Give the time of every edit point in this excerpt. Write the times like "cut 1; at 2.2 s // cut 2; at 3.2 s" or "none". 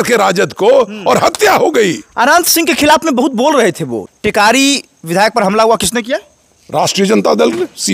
cut 1; at 4.0 s